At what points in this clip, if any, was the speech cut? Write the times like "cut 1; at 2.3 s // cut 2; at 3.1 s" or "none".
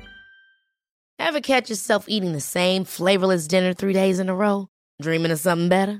cut 1; at 0.9 s